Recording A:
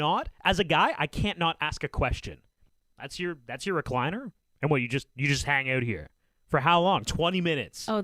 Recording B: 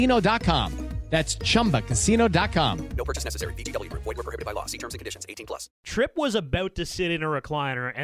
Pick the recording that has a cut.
B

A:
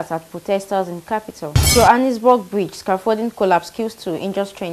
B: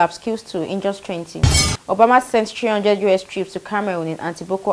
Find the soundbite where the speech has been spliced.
A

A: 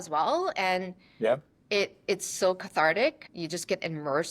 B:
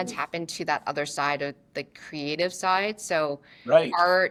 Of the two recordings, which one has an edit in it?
A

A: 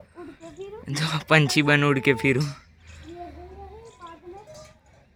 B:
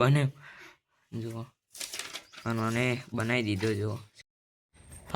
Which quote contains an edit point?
B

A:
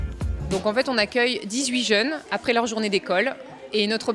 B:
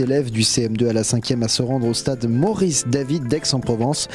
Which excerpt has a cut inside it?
A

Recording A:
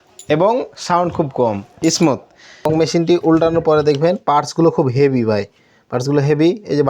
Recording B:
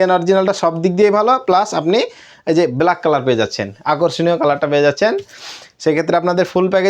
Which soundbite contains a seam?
A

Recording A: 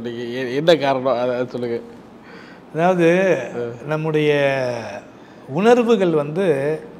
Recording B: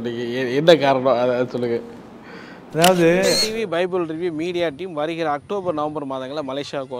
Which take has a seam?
B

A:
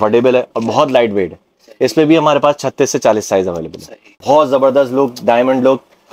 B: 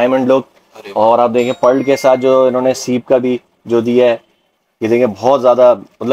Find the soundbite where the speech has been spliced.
A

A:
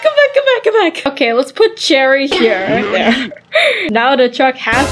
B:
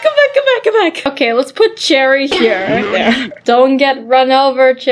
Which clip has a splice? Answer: B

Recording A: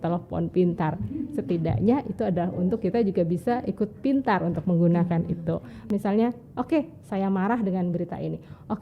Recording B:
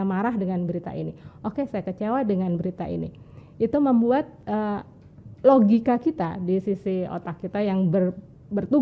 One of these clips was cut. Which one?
A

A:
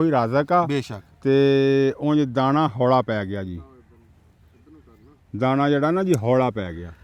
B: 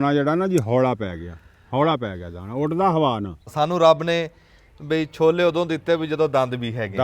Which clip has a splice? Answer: B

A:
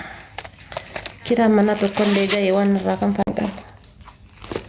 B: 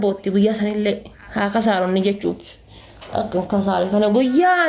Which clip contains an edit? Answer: A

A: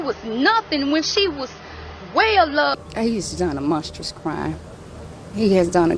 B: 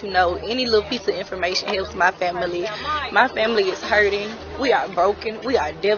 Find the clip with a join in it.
A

